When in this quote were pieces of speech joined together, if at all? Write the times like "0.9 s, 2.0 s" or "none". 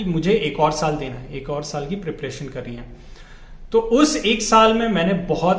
none

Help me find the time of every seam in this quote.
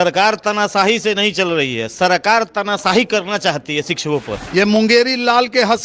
4.4 s

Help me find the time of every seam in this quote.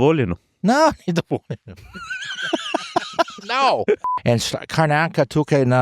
4.1 s

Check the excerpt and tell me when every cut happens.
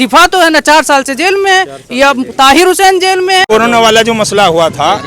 3.5 s

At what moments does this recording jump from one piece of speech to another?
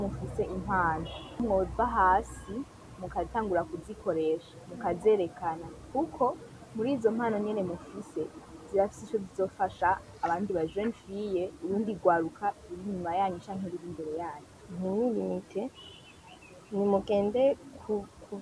1.4 s, 14.6 s

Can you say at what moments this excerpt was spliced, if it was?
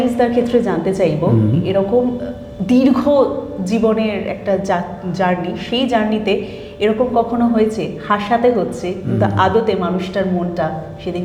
none

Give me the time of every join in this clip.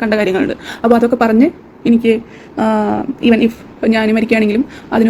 none

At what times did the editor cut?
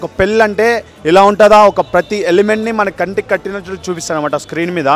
none

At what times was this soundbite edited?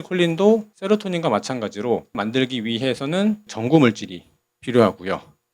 2.2 s, 3.5 s

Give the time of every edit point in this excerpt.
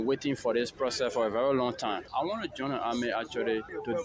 none

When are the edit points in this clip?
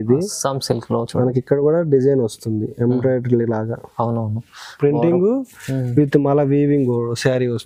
none

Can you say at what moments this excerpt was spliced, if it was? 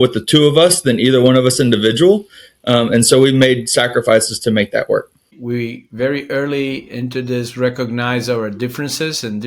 5.3 s

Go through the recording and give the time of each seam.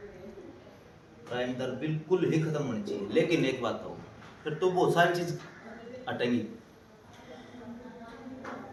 none

